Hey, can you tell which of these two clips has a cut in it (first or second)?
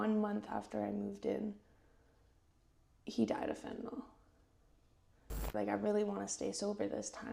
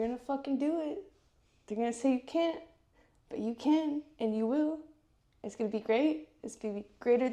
first